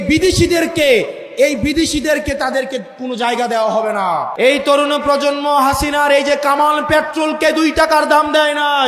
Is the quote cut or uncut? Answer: cut